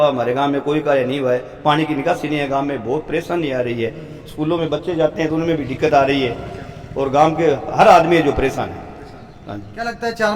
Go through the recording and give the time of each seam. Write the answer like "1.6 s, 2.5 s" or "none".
none